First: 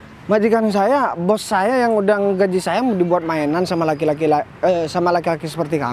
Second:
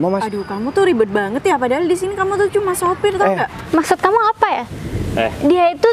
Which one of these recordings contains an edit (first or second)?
second